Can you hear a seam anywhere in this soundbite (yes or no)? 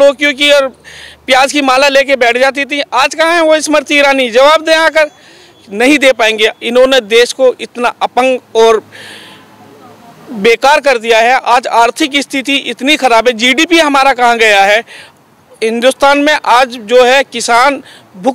no